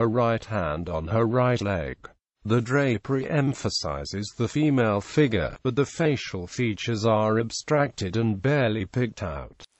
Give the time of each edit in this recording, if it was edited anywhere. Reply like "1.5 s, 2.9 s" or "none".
1.0 s

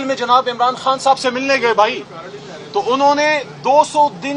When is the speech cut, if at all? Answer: none

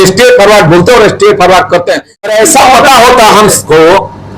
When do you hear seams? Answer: 2.3 s

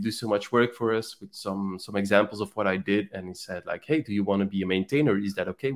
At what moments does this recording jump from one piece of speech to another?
none

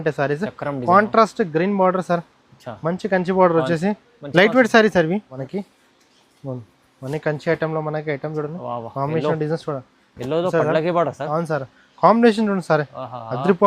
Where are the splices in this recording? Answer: 5.4 s

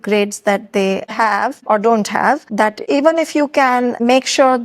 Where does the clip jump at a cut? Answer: none

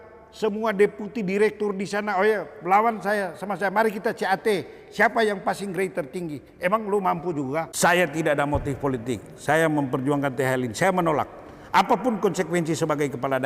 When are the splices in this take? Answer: 7.7 s

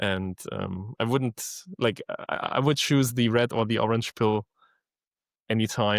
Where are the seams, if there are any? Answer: none

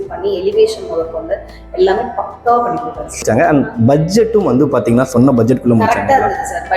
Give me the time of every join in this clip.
3.2 s

